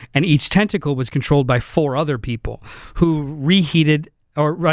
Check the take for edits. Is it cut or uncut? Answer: uncut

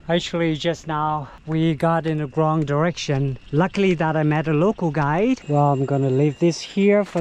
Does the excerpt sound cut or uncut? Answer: cut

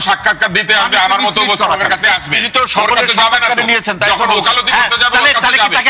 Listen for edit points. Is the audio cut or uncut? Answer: uncut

